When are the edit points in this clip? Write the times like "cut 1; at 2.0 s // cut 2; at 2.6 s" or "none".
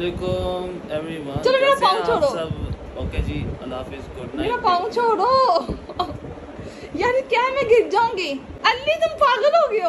cut 1; at 8.5 s